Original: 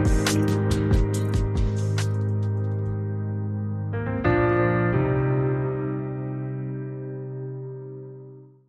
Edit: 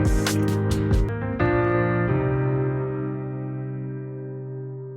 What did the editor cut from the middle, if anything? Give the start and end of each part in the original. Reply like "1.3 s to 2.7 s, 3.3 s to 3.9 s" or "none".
1.1 s to 3.9 s